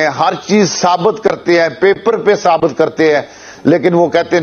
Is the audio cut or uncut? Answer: uncut